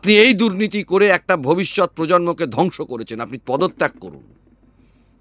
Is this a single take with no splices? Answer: yes; 0 cuts

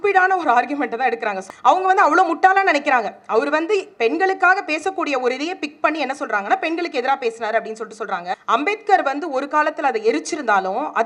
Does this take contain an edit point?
yes; 2 cuts; at 1.4 s, 8.3 s

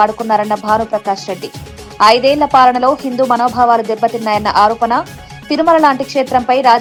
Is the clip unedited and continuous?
yes; 0 cuts

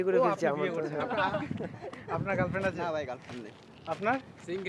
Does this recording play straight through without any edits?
yes; 0 cuts

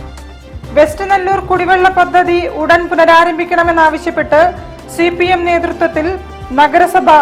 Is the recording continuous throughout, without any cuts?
yes; 0 cuts

